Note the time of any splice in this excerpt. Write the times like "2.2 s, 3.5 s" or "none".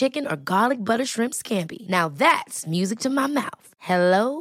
none